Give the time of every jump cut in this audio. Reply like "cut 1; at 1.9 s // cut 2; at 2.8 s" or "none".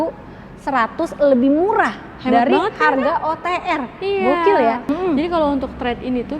cut 1; at 4.9 s